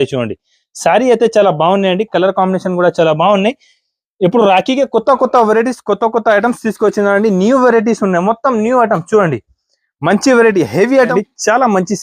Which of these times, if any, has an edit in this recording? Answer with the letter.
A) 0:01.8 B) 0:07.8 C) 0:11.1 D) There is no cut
C